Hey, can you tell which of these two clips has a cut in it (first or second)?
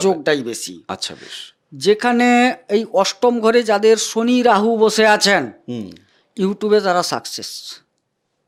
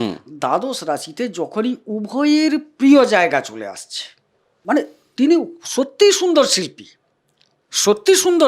second